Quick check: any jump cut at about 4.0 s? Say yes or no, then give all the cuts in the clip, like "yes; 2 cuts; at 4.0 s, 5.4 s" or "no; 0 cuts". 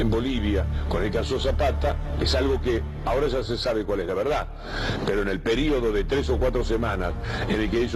no; 1 cut; at 2.1 s